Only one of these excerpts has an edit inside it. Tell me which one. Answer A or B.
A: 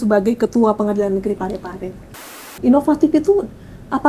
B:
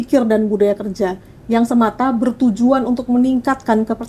A